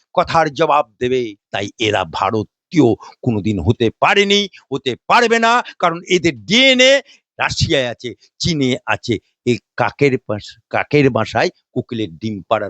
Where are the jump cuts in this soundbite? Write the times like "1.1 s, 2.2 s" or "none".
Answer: 1.4 s